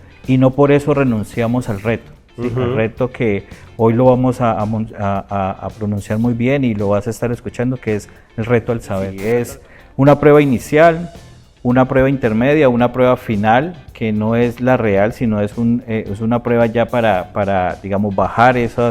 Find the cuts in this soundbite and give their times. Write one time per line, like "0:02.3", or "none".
0:09.2